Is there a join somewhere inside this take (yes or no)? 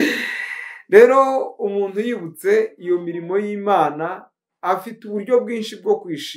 no